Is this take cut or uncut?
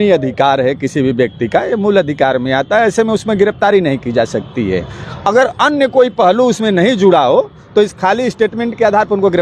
uncut